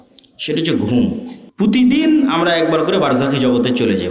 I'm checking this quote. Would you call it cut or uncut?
cut